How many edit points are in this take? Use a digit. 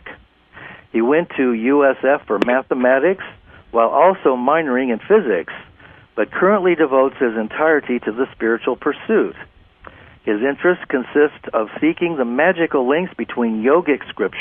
0